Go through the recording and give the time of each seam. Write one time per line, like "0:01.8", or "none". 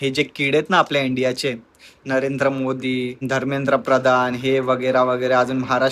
0:03.2